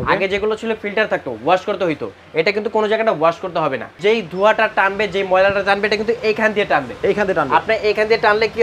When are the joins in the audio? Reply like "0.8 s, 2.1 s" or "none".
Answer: 3.9 s